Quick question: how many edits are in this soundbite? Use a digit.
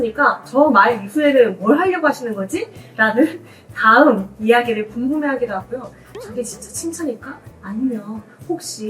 1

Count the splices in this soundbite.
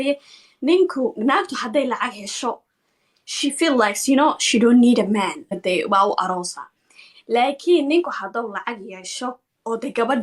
1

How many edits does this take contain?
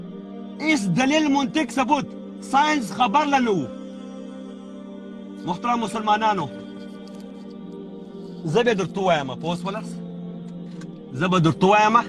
4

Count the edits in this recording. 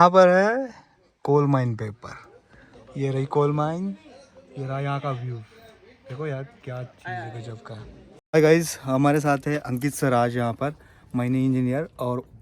1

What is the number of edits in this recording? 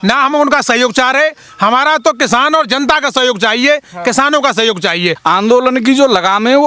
1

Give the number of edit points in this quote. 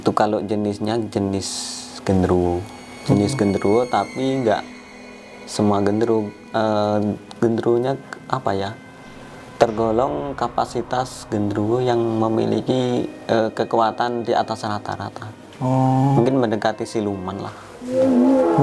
0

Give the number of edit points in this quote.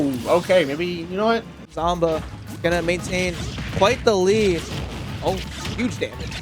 1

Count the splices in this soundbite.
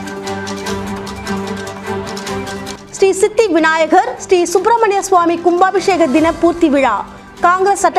1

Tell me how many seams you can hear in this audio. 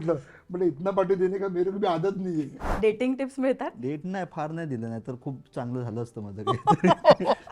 1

